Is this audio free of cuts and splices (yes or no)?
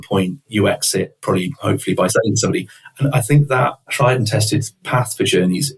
no